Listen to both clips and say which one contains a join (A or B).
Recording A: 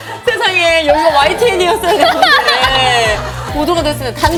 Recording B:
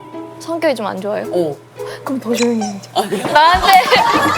B